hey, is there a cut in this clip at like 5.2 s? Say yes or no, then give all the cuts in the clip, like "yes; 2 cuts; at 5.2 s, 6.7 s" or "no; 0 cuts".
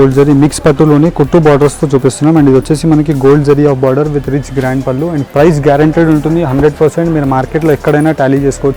yes; 1 cut; at 5.2 s